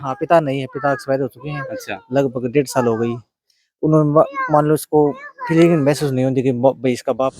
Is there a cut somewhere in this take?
no; 0 cuts

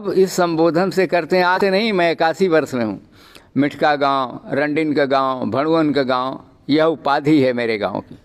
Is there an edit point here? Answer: yes; 1 cut; at 1.6 s

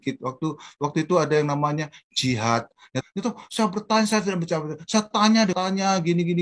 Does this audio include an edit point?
yes; 2 cuts; at 3.0 s, 5.5 s

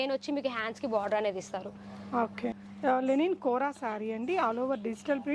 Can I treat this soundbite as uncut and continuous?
no; 1 cut; at 2.6 s

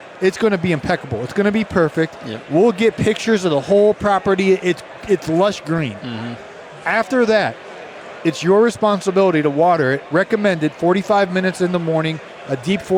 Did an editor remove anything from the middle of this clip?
no; 0 cuts

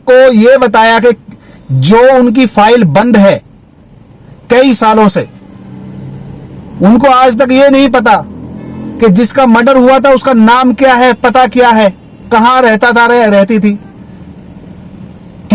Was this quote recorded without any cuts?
yes; 0 cuts

